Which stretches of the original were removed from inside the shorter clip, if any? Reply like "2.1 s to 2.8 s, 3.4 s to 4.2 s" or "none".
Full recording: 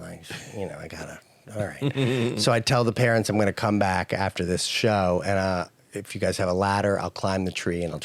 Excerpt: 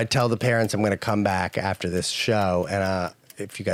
none